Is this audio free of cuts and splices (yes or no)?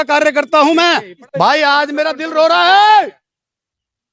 no